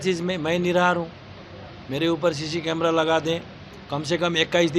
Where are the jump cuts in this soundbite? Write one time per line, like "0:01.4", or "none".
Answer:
none